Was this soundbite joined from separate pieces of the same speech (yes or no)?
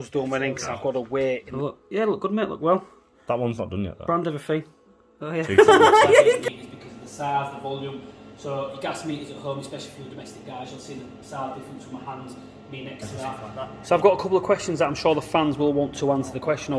yes